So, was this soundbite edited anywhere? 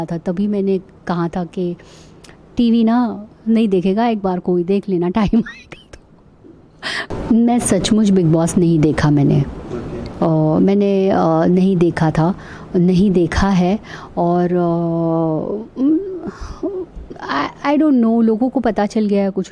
yes; 1 cut; at 7.1 s

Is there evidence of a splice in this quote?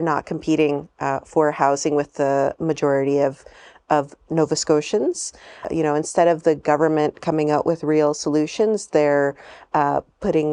yes; 1 cut; at 5.7 s

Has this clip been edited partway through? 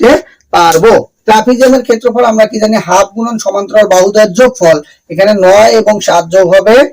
yes; 1 cut; at 1.1 s

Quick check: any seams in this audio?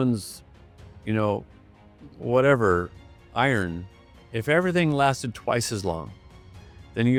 no; 0 cuts

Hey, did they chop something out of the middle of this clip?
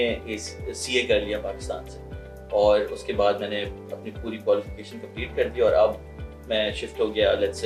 no; 0 cuts

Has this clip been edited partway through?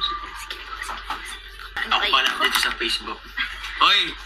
yes; 1 cut; at 1.7 s

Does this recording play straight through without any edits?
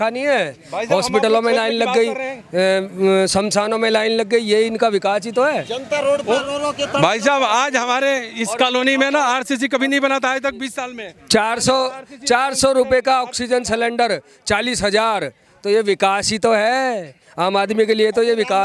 yes; 0 cuts

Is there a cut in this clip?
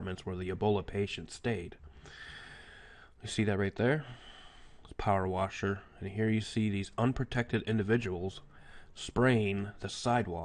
no; 0 cuts

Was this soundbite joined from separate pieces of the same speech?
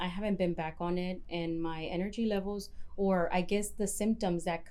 no; 0 cuts

